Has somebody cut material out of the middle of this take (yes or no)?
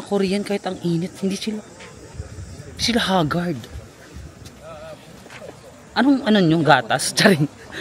no